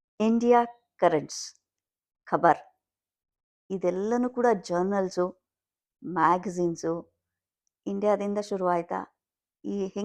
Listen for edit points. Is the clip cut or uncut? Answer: uncut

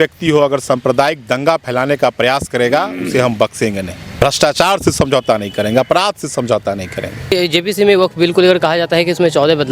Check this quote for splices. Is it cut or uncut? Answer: cut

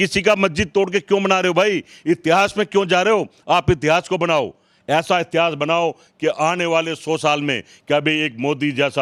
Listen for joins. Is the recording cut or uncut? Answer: uncut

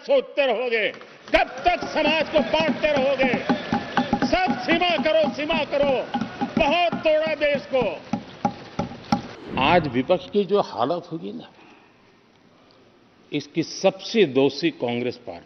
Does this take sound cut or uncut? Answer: cut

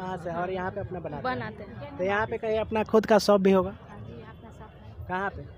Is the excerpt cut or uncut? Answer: uncut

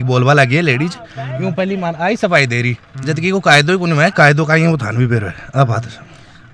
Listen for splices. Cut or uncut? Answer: uncut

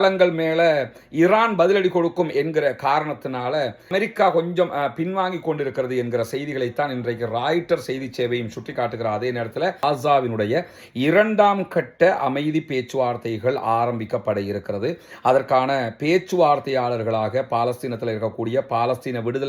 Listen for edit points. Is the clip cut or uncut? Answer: cut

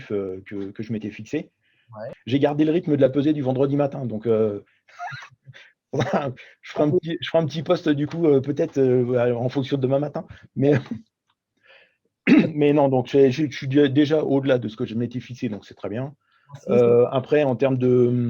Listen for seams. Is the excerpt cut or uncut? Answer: cut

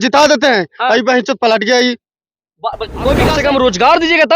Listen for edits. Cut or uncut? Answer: cut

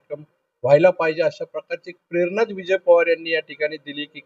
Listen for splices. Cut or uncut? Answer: uncut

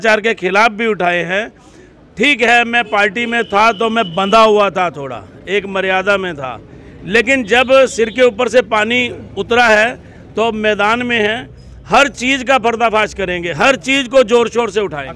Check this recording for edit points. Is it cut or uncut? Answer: uncut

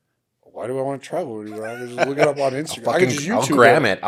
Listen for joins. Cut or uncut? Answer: uncut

